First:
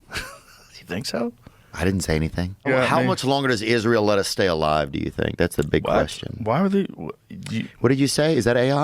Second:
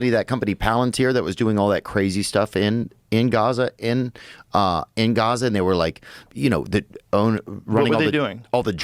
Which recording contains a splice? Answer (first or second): first